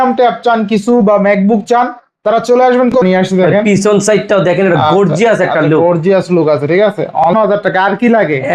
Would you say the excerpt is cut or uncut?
cut